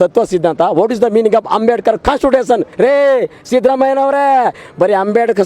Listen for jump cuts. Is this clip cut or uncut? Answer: cut